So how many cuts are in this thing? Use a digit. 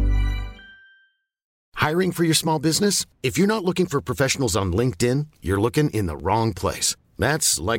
1